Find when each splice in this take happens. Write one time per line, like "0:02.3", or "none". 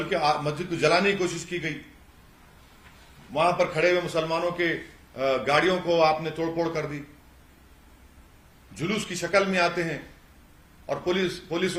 none